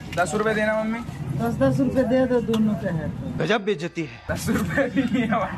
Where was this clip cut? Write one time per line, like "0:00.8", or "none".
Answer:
0:03.3
0:04.2